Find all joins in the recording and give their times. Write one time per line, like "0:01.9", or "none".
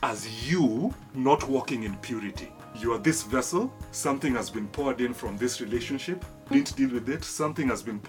0:01.0
0:02.7
0:03.9
0:06.5